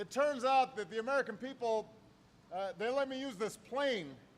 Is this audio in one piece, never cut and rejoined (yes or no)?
yes